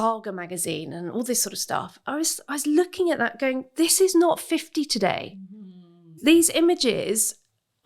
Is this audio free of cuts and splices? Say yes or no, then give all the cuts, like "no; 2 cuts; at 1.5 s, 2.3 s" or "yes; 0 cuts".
no; 1 cut; at 6.1 s